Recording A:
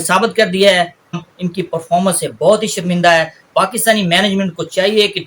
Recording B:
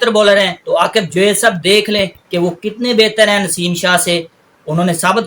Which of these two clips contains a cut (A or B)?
A